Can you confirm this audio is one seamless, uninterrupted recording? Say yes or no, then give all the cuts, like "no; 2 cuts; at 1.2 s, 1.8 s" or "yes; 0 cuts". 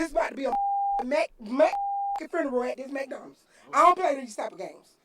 no; 1 cut; at 3.7 s